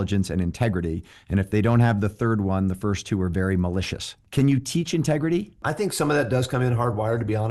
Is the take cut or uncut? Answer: cut